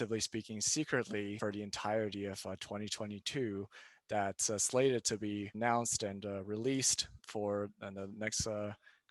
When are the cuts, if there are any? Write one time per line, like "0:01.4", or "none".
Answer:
0:01.4
0:05.5
0:07.2